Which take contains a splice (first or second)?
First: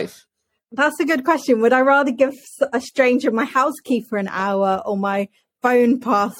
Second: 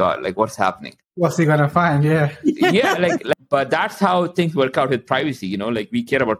second